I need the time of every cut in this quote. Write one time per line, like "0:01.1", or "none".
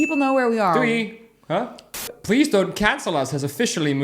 0:02.0